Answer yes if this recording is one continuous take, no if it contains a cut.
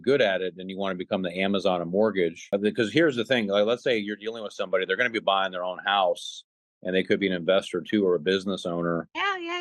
no